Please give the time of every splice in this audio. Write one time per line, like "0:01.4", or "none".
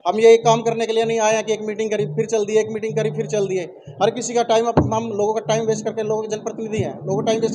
none